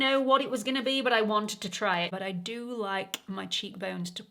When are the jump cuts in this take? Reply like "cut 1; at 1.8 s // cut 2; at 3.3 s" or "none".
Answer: cut 1; at 2.1 s